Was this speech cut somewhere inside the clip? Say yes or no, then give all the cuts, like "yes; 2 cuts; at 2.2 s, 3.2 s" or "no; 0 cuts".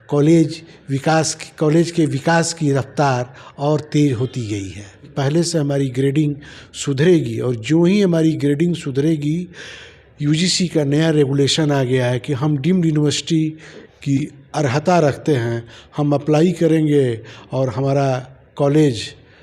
yes; 1 cut; at 5.0 s